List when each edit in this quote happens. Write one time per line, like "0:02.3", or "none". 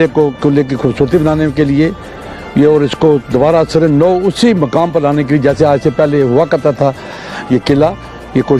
none